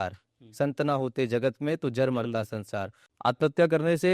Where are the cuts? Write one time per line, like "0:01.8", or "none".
0:03.0